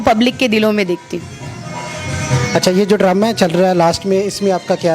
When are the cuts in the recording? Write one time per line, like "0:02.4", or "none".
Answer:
none